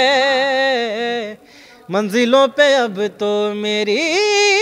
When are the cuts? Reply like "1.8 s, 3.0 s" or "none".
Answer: none